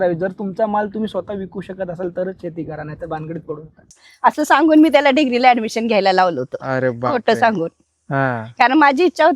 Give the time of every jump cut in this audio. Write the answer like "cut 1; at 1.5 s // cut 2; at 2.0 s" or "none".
cut 1; at 3.9 s